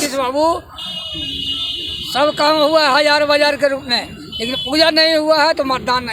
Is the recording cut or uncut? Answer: uncut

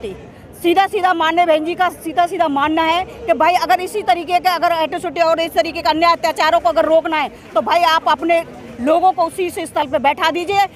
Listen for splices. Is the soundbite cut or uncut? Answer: uncut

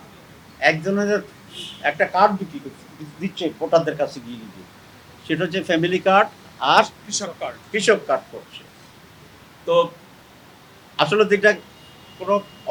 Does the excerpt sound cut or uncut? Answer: uncut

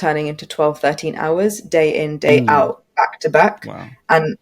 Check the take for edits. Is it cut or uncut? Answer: uncut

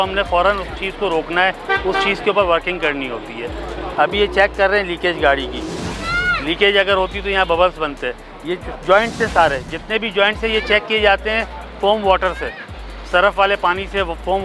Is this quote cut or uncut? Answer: uncut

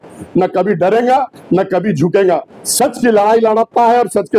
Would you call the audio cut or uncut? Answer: uncut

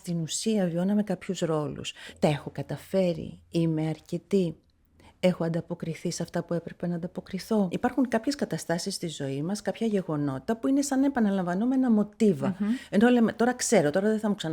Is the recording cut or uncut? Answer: cut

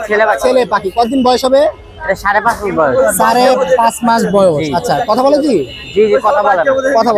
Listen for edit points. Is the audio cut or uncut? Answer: uncut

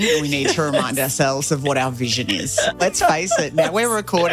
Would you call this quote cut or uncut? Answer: cut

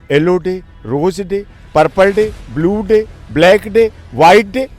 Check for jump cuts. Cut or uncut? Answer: uncut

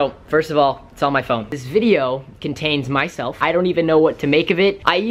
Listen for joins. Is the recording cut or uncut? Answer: cut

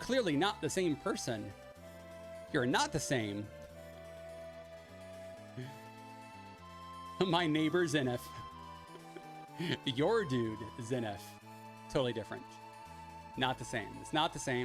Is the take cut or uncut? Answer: uncut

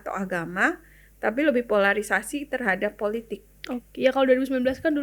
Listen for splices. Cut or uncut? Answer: uncut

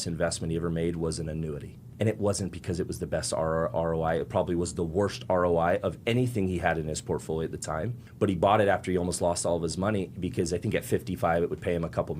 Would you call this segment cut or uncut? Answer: cut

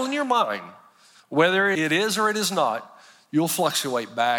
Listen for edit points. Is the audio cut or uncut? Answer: cut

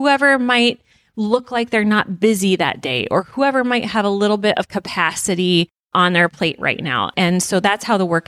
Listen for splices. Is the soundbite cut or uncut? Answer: uncut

